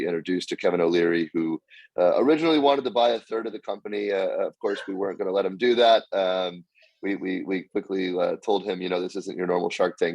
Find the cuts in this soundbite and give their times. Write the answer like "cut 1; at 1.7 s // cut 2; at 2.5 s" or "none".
none

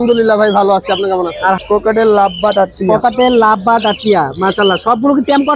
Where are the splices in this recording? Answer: cut 1; at 1.6 s

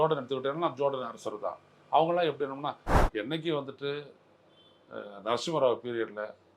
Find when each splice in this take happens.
cut 1; at 2.9 s

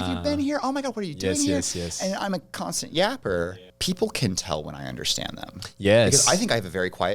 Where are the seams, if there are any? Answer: cut 1; at 3.5 s

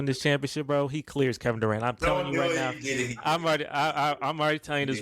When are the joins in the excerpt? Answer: none

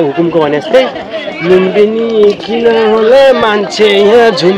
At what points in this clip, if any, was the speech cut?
none

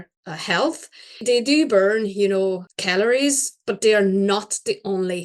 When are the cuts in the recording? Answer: cut 1; at 1.2 s // cut 2; at 2.7 s

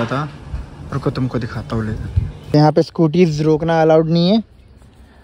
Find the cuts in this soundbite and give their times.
cut 1; at 2.5 s

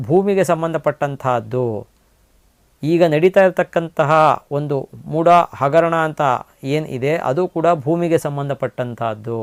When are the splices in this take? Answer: none

